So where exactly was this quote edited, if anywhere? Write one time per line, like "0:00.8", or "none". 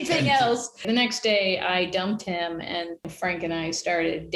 0:00.8
0:03.1